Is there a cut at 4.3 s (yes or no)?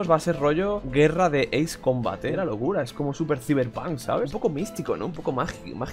yes